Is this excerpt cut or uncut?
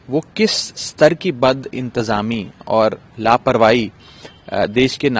uncut